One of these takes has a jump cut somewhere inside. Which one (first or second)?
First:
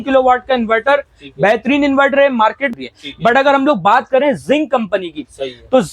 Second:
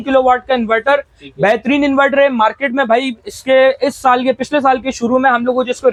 first